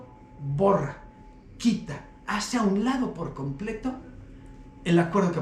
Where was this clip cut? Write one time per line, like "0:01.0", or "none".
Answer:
none